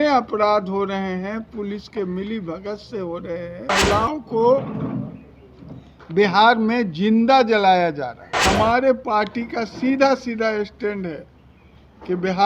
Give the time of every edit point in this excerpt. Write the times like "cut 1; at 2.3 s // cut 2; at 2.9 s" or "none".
cut 1; at 3.7 s // cut 2; at 8.4 s